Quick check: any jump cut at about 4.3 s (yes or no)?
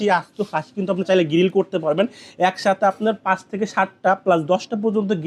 no